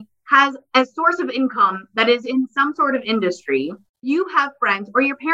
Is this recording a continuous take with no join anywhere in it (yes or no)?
no